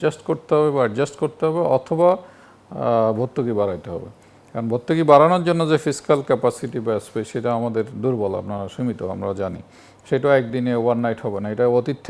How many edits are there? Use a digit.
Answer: 0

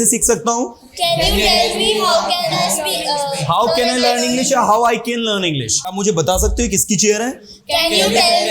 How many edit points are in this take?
1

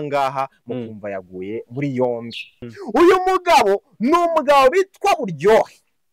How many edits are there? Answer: 1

